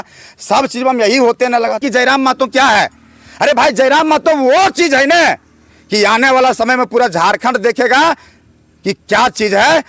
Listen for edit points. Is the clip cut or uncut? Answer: cut